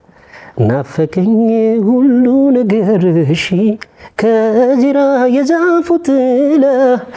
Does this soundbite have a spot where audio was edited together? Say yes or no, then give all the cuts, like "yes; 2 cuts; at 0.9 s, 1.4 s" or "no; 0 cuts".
no; 0 cuts